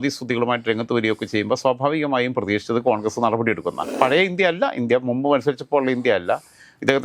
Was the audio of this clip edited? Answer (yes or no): yes